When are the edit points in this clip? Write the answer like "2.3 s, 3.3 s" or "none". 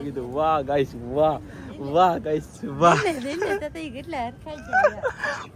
none